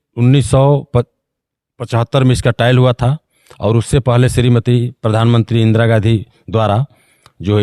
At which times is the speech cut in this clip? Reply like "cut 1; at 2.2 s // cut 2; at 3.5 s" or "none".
none